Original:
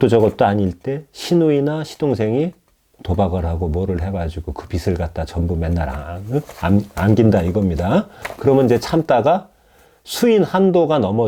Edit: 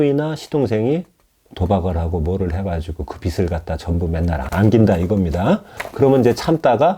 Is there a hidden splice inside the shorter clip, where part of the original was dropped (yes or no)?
yes